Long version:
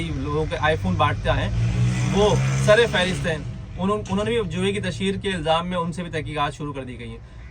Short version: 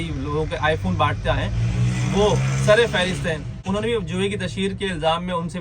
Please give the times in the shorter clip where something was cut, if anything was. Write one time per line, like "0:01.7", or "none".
0:03.6